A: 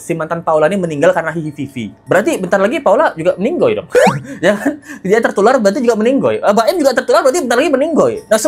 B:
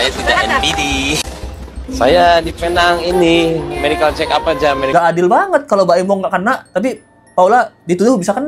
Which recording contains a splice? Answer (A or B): B